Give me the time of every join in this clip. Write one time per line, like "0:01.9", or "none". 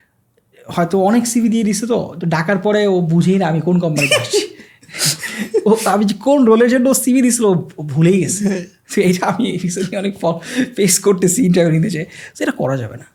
none